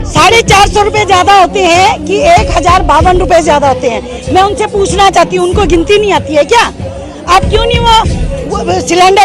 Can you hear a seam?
no; 0 cuts

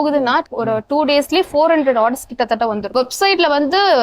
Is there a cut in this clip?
yes; 1 cut; at 2.9 s

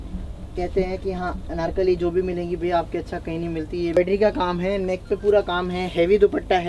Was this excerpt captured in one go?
no; 1 cut; at 4.0 s

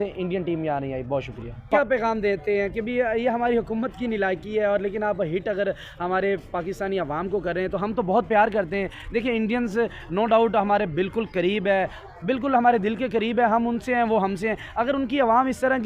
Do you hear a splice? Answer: yes; 1 cut; at 1.7 s

